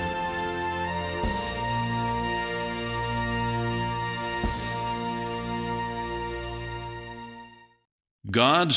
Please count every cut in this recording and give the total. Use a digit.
1